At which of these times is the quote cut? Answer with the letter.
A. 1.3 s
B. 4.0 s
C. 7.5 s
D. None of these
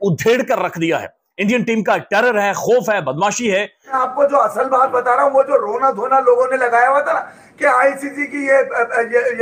B